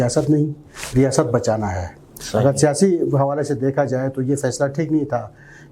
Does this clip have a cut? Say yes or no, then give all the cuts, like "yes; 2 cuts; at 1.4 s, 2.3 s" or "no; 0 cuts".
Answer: no; 0 cuts